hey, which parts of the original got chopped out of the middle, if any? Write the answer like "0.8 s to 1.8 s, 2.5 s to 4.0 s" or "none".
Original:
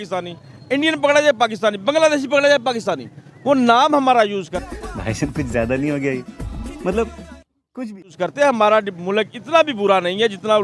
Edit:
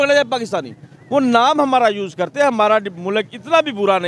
4.5 s to 8.2 s